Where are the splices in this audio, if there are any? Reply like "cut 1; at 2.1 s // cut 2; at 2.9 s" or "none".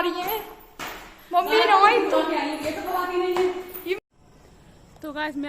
cut 1; at 4.0 s